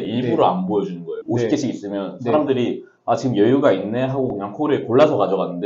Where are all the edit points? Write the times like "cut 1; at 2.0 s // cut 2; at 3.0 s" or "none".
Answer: cut 1; at 1.2 s